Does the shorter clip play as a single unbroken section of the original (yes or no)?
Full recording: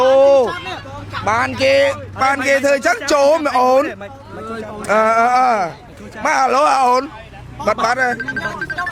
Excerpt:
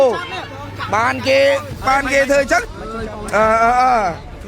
no